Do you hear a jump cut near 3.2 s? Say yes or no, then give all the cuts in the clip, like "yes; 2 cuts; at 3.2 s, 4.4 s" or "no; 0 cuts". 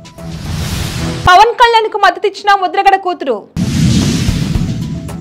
no; 1 cut; at 1.0 s